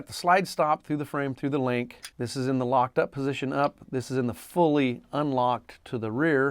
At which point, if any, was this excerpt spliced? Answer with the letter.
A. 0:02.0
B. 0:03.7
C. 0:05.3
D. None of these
A